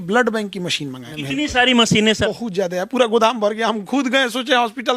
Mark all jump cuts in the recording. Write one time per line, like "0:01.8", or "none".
0:01.1
0:02.2